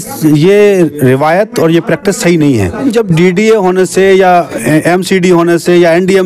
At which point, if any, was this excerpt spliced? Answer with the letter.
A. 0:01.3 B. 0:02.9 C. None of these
B